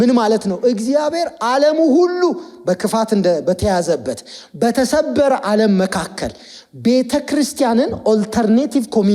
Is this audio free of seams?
yes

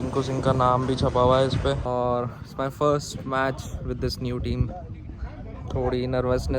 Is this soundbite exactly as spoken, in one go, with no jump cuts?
no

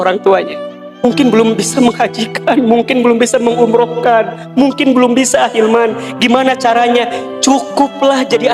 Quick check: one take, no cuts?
no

